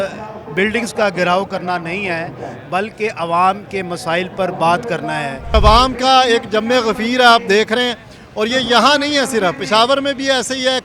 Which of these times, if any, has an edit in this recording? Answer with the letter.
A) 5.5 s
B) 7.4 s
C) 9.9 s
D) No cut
A